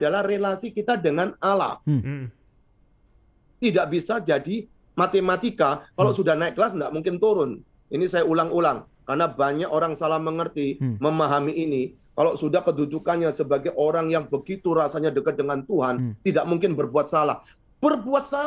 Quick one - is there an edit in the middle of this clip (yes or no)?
no